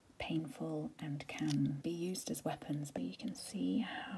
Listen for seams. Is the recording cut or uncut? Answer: cut